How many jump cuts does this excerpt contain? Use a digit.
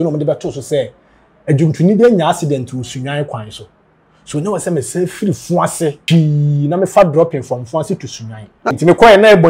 2